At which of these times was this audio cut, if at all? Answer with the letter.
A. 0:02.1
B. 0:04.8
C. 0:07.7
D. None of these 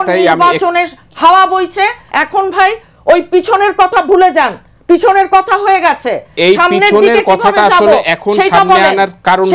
A